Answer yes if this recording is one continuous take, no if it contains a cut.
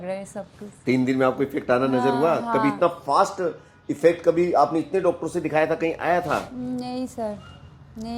yes